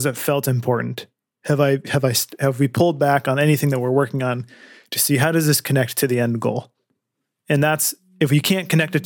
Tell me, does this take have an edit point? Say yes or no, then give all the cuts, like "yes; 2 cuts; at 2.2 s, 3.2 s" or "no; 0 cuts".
no; 0 cuts